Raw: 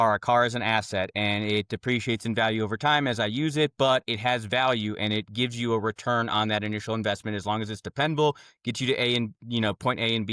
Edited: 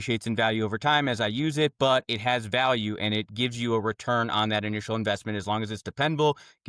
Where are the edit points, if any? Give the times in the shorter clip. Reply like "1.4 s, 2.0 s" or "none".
none